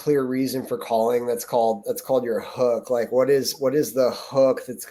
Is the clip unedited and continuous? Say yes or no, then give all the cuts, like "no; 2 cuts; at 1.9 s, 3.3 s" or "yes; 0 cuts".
yes; 0 cuts